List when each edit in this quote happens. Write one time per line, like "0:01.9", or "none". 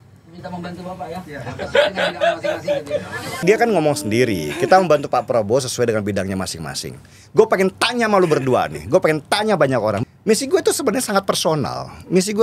0:03.3
0:10.0